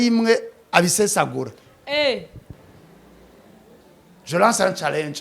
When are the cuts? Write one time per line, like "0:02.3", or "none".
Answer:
0:02.4